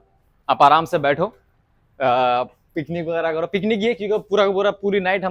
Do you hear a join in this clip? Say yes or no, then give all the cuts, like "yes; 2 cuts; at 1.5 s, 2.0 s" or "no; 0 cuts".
no; 0 cuts